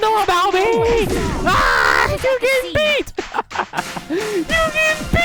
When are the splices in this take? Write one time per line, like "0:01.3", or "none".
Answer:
none